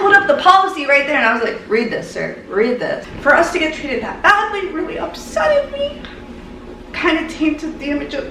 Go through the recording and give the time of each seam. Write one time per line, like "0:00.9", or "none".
0:03.1